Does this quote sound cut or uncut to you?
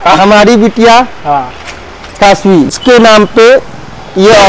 cut